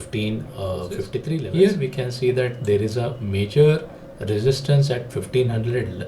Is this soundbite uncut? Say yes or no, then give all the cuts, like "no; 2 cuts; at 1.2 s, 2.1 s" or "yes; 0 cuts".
no; 1 cut; at 1.4 s